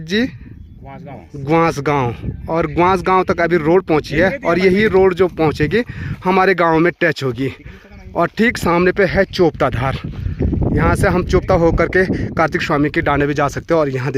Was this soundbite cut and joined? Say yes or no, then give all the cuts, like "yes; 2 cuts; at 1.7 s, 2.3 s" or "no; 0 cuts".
no; 0 cuts